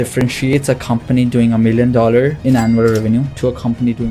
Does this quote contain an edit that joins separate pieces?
yes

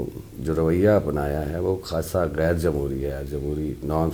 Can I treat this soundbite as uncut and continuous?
yes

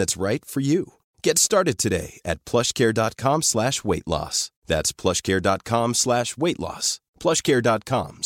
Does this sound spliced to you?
no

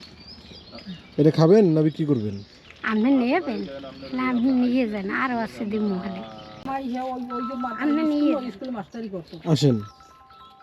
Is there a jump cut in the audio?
yes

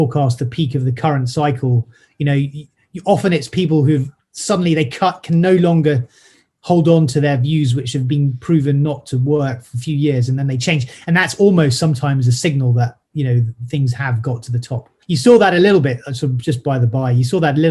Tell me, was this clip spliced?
no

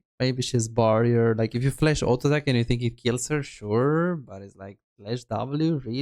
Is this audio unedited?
yes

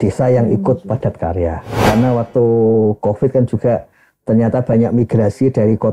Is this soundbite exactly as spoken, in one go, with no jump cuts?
no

